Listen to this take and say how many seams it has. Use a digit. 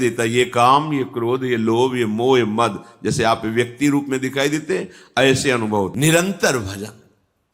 1